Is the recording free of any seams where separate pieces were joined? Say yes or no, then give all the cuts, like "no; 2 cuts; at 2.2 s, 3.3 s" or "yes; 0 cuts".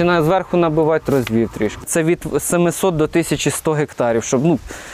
no; 1 cut; at 1.8 s